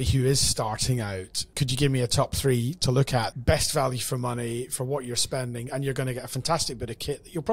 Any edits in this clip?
yes; 2 cuts; at 1.4 s, 3.3 s

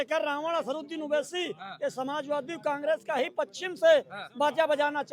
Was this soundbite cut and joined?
no; 0 cuts

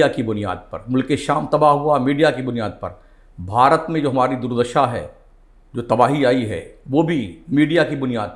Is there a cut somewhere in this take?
no; 0 cuts

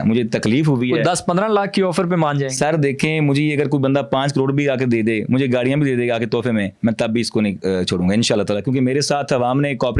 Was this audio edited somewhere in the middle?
no; 0 cuts

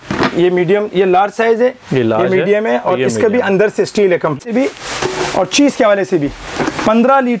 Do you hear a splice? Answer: yes; 1 cut; at 4.4 s

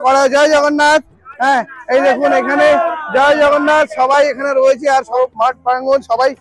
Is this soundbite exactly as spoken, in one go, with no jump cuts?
no; 1 cut; at 5.1 s

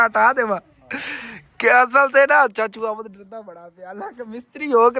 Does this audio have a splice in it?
no; 0 cuts

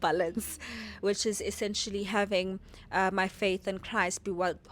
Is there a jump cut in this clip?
no; 0 cuts

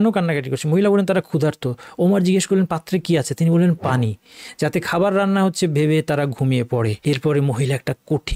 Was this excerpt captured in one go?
no; 1 cut; at 7.0 s

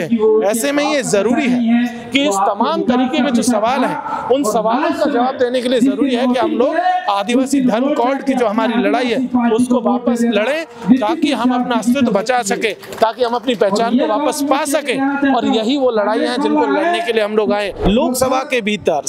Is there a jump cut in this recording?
yes; 1 cut; at 17.9 s

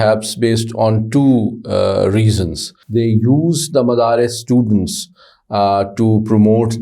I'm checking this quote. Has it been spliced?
yes; 1 cut; at 2.8 s

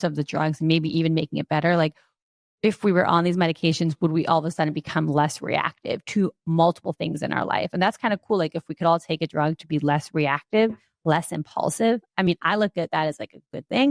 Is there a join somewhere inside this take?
no; 0 cuts

